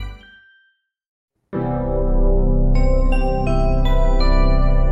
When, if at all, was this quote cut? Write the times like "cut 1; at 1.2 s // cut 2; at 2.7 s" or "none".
cut 1; at 1.2 s